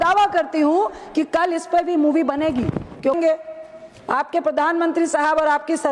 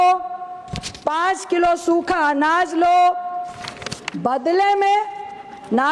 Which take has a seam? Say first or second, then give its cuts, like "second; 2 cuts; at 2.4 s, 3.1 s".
first; 1 cut; at 3.2 s